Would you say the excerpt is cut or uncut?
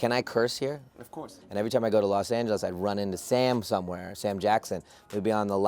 cut